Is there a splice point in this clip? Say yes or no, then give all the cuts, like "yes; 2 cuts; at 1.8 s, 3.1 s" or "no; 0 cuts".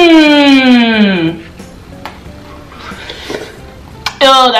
no; 0 cuts